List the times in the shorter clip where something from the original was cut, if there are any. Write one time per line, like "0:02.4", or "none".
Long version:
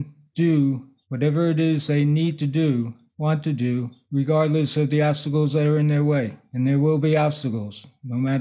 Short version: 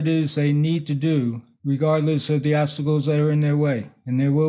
0:01.5